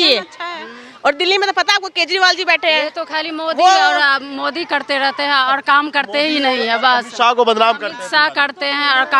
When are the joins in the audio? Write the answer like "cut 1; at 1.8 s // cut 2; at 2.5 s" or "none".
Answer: none